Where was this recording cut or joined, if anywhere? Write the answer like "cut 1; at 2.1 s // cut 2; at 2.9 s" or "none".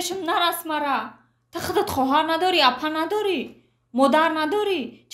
none

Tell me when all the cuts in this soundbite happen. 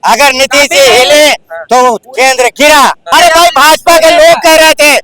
cut 1; at 3.0 s

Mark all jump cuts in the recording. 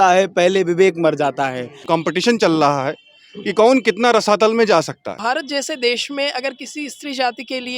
cut 1; at 1.8 s // cut 2; at 5.1 s

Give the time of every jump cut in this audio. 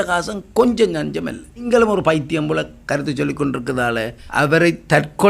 cut 1; at 1.7 s // cut 2; at 4.2 s

